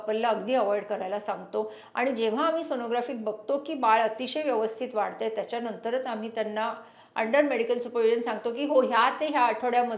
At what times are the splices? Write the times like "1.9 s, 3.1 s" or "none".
none